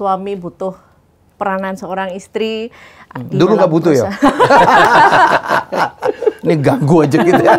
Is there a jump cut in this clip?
no; 0 cuts

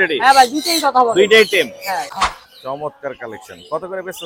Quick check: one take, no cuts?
no; 1 cut; at 2.1 s

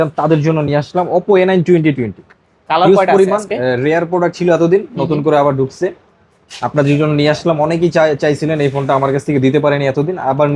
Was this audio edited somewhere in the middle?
no; 0 cuts

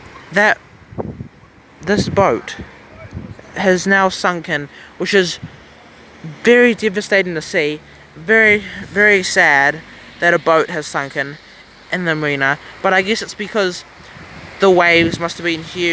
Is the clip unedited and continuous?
yes; 0 cuts

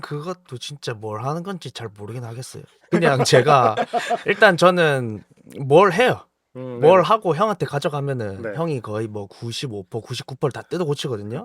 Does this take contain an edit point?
no; 0 cuts

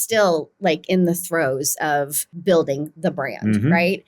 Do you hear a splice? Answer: yes; 1 cut; at 2.2 s

